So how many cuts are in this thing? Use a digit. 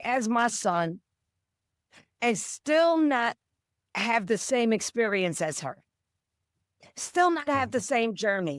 0